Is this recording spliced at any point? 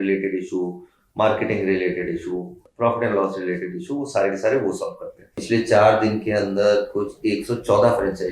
yes; 2 cuts; at 2.6 s, 5.4 s

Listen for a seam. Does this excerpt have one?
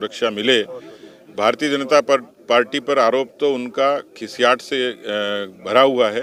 no; 0 cuts

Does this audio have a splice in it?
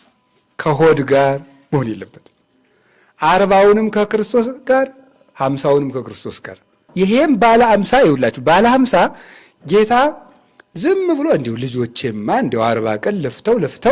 yes; 1 cut; at 6.8 s

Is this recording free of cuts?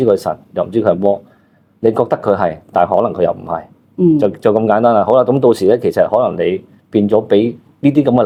yes; 0 cuts

